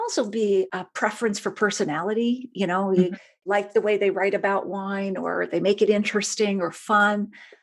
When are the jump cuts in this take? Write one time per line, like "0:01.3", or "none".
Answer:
none